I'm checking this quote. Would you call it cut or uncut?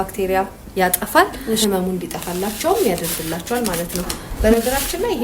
cut